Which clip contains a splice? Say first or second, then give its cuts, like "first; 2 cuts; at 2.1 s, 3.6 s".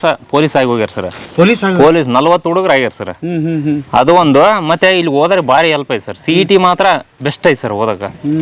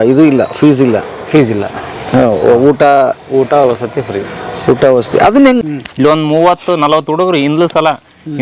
second; 1 cut; at 5.6 s